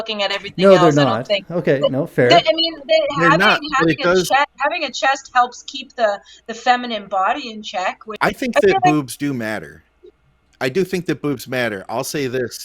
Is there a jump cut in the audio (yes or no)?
yes